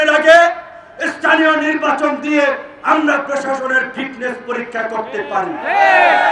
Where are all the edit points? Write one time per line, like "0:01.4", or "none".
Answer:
none

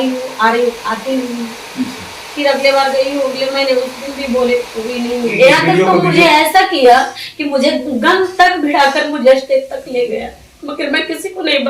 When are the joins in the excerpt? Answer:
0:05.3

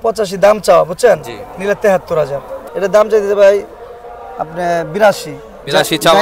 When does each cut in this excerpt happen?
0:02.6

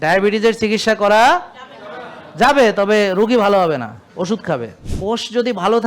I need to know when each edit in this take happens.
0:04.9

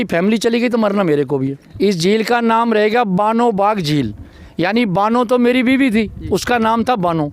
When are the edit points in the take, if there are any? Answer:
0:01.6

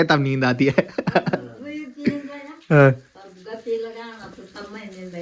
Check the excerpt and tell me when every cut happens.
none

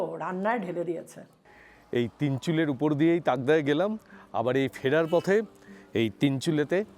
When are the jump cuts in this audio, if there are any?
0:01.7

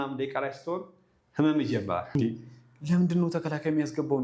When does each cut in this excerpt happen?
0:02.1

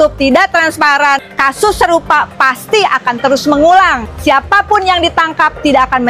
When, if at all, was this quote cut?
0:01.3
0:04.1

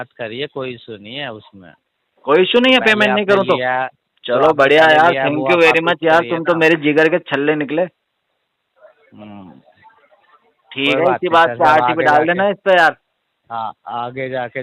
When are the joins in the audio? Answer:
none

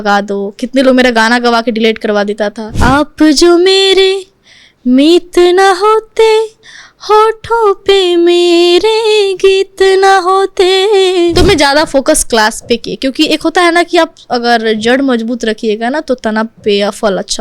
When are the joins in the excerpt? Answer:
0:02.7
0:11.3

